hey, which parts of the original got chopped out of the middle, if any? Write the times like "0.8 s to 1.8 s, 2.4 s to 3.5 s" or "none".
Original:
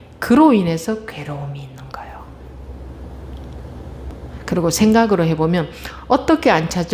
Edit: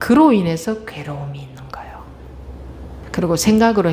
3.2 s to 4.4 s